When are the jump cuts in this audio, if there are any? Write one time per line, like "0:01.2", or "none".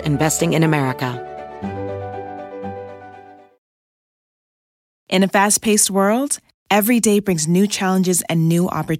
0:01.1